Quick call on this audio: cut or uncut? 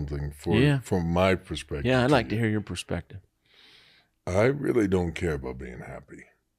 uncut